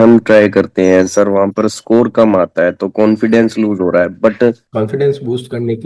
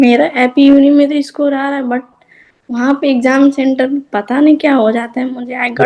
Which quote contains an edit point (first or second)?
first